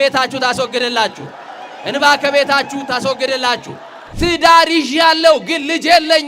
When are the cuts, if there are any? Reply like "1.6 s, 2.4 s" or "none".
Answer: 4.1 s